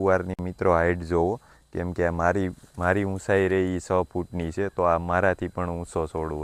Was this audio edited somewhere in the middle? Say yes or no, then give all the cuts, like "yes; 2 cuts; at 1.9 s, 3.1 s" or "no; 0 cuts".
no; 0 cuts